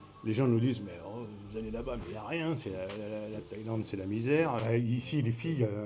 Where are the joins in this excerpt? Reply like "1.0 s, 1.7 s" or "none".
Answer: 4.6 s